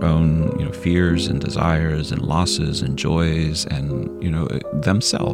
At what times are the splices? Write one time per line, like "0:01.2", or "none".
none

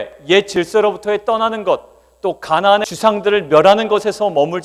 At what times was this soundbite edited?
0:02.9

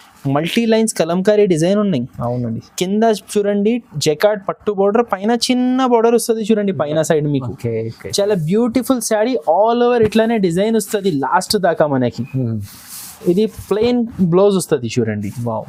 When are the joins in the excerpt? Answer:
none

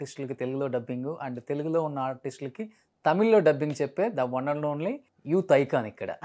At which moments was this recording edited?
0:05.1

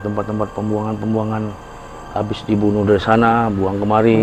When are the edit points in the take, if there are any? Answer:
none

